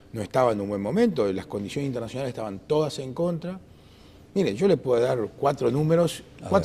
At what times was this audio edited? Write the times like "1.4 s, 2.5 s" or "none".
none